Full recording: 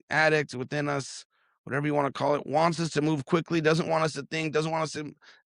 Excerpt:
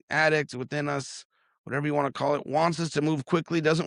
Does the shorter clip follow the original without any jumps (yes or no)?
yes